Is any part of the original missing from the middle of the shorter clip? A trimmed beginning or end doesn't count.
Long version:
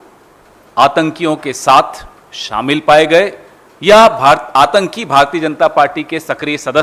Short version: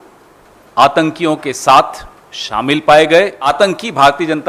yes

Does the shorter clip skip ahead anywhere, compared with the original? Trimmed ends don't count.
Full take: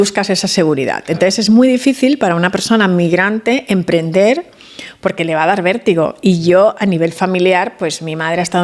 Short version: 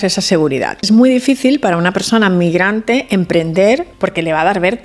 yes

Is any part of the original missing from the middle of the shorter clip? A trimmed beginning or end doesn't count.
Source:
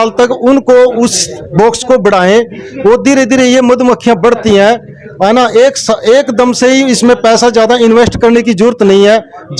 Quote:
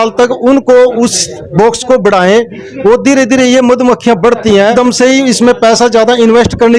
yes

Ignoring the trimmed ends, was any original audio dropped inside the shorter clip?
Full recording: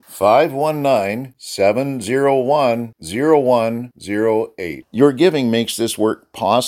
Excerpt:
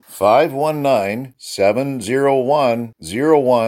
no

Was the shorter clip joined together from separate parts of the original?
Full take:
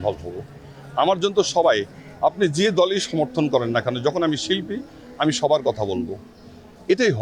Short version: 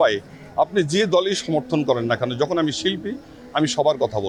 no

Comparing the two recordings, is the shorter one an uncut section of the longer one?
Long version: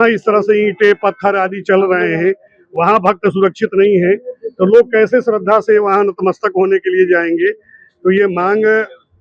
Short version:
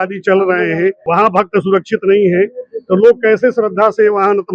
no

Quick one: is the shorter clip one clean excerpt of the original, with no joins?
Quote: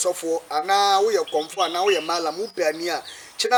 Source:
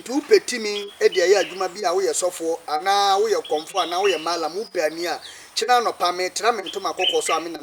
yes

